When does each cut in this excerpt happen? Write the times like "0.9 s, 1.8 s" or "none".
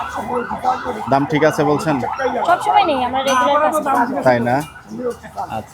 none